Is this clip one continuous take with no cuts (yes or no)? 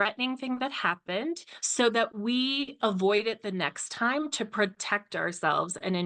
yes